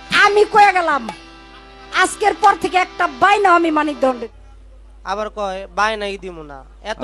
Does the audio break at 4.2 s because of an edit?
yes; 1 cut; at 4.2 s

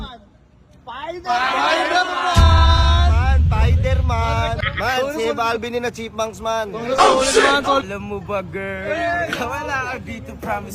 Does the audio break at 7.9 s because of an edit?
yes; 2 cuts; at 4.7 s, 7.9 s

